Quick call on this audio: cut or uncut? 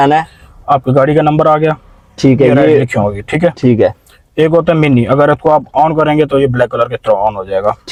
uncut